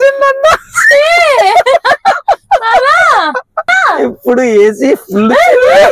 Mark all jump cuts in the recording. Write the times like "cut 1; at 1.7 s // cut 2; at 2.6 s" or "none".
cut 1; at 3.7 s